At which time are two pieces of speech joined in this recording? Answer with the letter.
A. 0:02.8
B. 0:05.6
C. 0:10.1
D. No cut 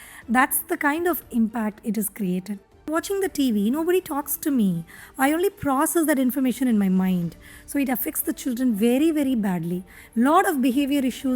A